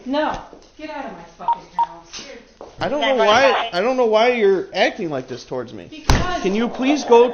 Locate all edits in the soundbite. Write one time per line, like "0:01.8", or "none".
none